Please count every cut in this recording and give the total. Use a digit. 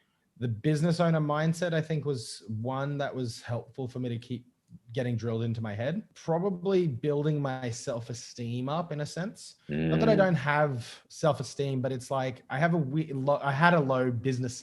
1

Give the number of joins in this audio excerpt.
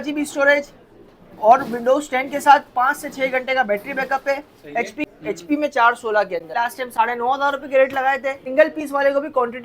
3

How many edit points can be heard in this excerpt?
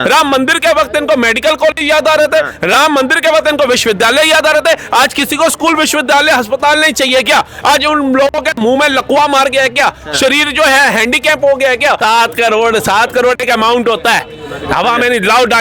1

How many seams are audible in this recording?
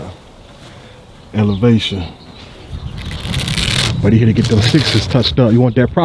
1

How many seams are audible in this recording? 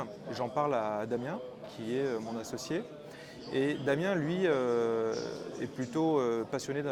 0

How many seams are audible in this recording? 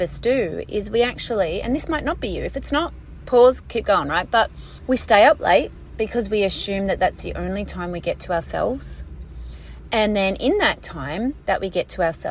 3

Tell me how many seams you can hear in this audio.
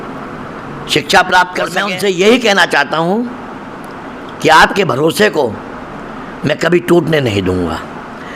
1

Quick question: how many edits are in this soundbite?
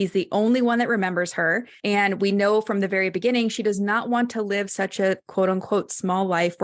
1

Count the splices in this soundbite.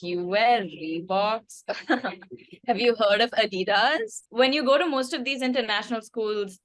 0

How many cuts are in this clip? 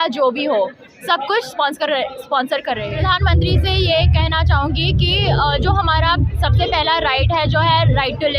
1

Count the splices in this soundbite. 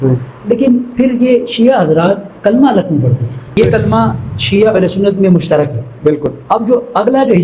1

